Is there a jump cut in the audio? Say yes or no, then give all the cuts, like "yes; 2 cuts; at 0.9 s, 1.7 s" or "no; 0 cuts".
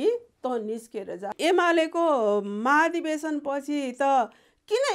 yes; 1 cut; at 1.3 s